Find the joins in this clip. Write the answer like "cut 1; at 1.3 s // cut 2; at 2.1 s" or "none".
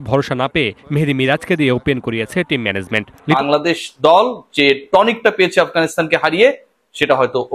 cut 1; at 3.4 s